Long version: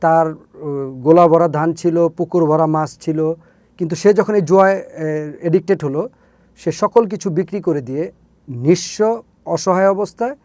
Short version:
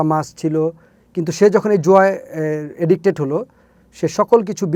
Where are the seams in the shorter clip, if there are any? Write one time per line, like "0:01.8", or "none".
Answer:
none